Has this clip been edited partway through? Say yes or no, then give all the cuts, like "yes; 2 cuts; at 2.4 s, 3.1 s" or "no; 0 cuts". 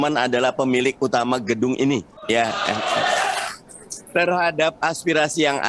no; 0 cuts